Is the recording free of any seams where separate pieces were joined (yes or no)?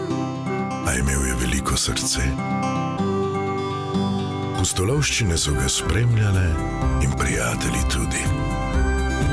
yes